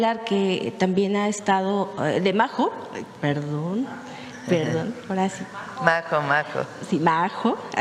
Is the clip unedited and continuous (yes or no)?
yes